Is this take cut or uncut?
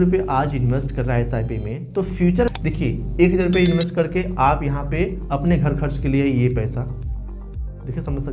cut